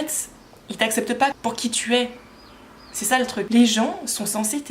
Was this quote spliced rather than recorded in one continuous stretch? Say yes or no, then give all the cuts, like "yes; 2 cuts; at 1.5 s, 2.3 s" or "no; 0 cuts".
yes; 2 cuts; at 1.3 s, 3.5 s